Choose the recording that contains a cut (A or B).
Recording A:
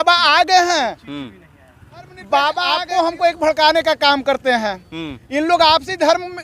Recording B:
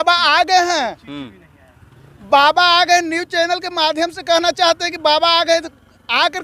A